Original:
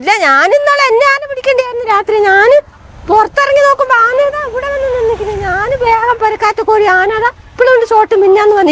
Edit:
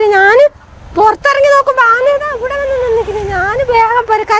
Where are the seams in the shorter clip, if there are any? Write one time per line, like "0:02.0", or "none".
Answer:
none